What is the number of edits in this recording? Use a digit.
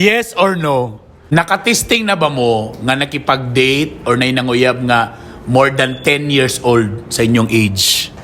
1